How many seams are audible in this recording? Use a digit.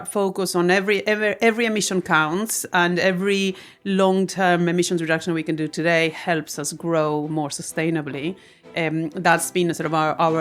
0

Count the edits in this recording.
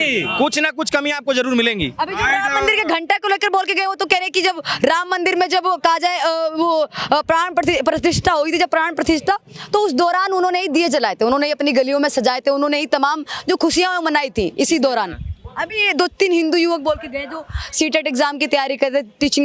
0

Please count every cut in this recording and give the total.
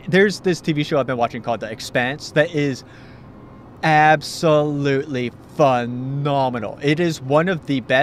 1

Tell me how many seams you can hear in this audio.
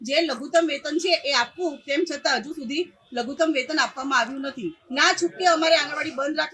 1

